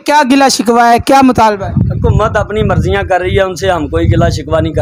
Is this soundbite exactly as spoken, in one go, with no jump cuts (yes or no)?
yes